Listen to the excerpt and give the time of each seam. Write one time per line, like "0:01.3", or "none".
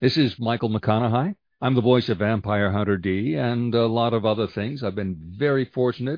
0:01.4